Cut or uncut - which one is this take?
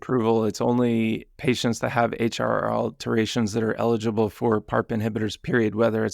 uncut